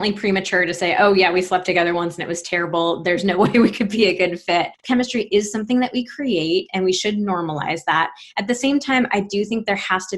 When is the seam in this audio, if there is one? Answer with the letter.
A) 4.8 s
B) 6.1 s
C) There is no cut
A